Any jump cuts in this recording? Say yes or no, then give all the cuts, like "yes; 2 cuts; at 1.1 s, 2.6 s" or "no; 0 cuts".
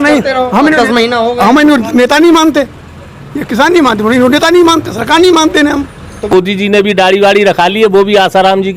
yes; 1 cut; at 6.3 s